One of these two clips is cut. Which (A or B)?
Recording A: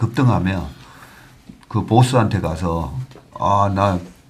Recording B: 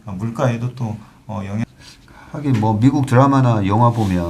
B